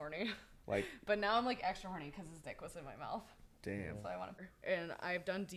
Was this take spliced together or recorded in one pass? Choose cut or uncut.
cut